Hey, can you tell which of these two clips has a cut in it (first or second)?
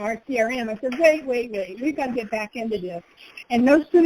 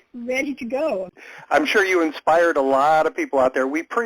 second